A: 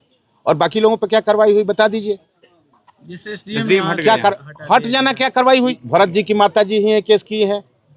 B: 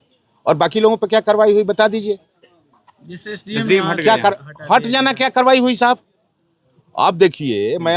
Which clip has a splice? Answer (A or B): A